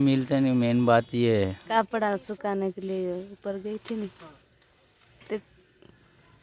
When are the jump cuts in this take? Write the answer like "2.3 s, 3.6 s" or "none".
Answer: 1.6 s